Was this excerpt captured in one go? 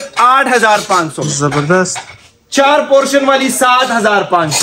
yes; 0 cuts

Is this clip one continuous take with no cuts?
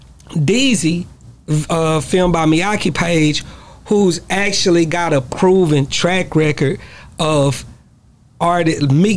yes; 0 cuts

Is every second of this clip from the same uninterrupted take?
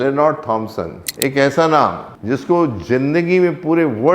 no; 2 cuts; at 1.0 s, 2.1 s

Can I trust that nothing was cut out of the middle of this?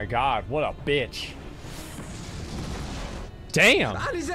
no; 1 cut; at 3.2 s

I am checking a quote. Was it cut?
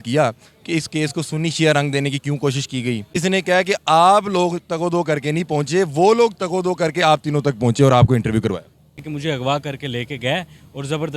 yes; 2 cuts; at 3.1 s, 9.0 s

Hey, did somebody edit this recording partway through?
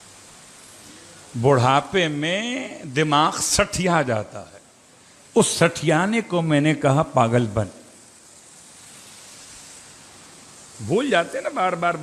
no; 0 cuts

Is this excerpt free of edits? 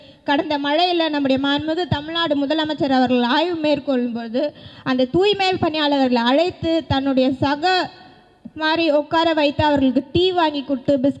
yes; 0 cuts

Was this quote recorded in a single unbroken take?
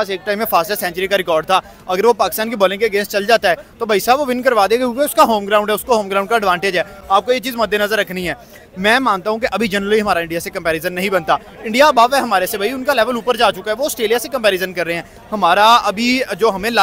yes; 0 cuts

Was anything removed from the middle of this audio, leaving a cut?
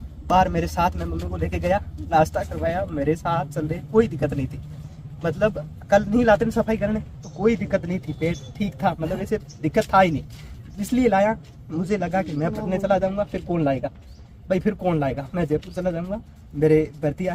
no; 0 cuts

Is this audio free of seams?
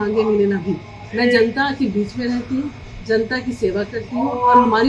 yes; 0 cuts

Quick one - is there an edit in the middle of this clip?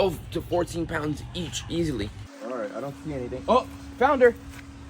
yes; 1 cut; at 2.3 s

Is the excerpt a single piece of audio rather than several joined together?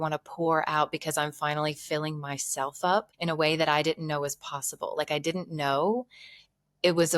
no; 1 cut; at 3.1 s

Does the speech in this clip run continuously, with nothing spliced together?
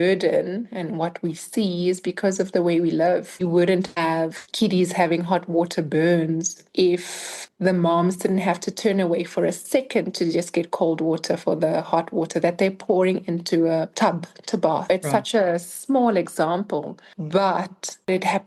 no; 1 cut; at 3.3 s

